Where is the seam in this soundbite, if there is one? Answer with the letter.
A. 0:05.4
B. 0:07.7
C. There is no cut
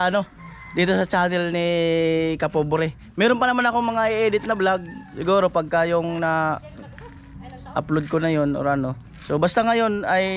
C